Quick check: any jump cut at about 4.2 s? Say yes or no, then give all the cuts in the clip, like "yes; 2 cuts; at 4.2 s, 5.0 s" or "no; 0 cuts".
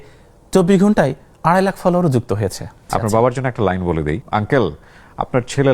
yes; 2 cuts; at 2.9 s, 4.2 s